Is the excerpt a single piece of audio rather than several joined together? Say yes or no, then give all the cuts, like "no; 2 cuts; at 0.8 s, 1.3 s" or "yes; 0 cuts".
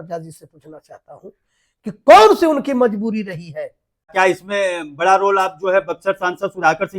no; 1 cut; at 4.1 s